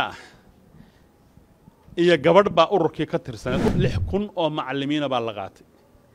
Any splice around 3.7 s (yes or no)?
yes